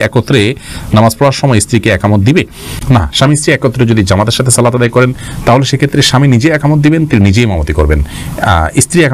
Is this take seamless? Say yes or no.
yes